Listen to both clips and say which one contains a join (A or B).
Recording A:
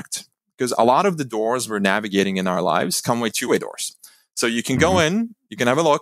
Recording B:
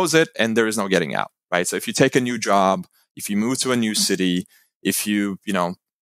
A